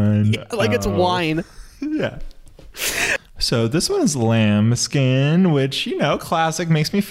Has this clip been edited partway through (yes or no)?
yes